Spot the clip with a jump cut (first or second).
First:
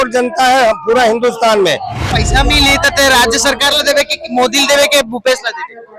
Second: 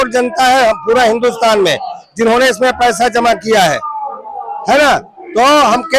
first